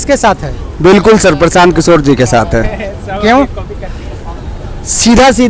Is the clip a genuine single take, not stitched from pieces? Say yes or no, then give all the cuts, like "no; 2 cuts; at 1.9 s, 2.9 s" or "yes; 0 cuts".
yes; 0 cuts